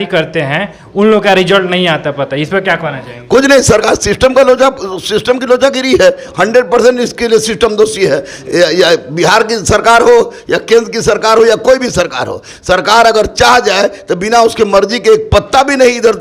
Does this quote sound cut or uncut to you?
uncut